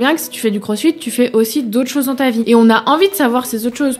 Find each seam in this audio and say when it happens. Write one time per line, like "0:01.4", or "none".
0:02.4